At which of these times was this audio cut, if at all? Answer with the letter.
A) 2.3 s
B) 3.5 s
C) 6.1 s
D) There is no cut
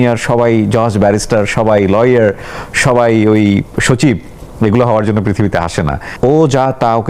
C